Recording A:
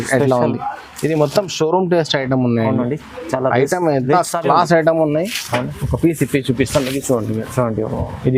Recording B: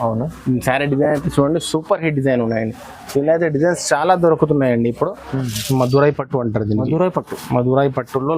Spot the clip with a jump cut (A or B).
B